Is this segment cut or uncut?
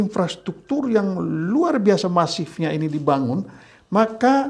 uncut